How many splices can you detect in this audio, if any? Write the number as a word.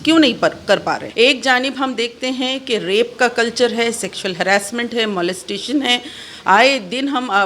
one